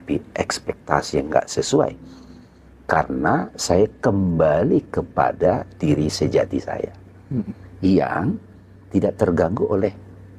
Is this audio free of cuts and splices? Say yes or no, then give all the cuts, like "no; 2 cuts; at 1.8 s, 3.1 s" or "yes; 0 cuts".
yes; 0 cuts